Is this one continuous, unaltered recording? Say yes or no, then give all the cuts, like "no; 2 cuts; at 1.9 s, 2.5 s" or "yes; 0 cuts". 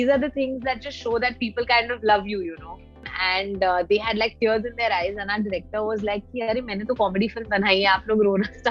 no; 1 cut; at 3.1 s